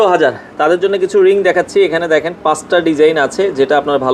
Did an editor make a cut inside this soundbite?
no; 0 cuts

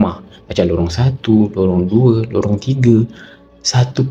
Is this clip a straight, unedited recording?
yes; 0 cuts

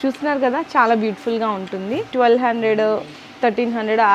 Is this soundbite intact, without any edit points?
no; 1 cut; at 2.1 s

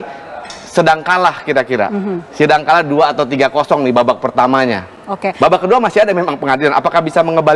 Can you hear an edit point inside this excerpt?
no; 0 cuts

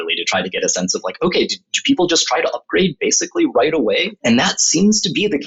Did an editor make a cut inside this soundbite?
yes; 1 cut; at 4.1 s

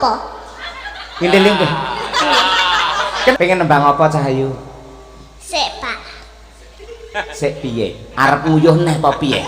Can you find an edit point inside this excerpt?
yes; 1 cut; at 3.3 s

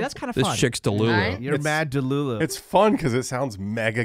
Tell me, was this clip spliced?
yes; 1 cut; at 2.4 s

